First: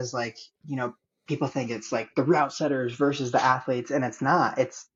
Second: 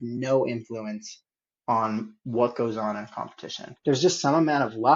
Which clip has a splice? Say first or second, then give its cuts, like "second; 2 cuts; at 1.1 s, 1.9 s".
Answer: second; 1 cut; at 3.6 s